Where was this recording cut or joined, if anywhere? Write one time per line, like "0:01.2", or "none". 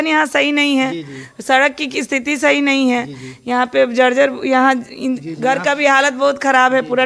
none